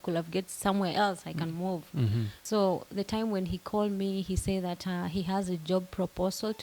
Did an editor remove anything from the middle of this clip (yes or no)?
yes